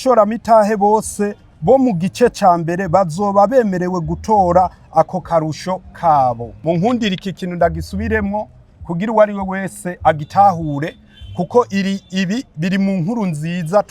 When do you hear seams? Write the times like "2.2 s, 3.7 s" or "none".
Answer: 6.5 s